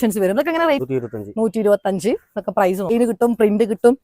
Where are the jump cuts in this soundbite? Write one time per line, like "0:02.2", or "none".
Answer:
0:00.8
0:02.9